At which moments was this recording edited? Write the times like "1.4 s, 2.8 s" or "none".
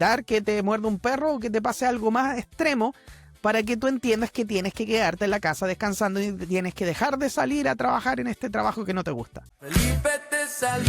9.6 s

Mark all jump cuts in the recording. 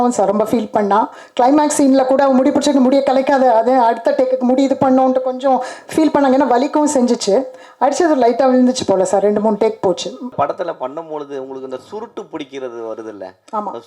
10.3 s

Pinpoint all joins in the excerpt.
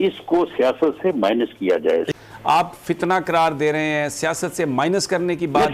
2.1 s

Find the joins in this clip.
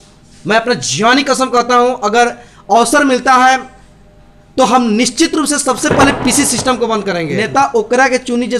7.4 s

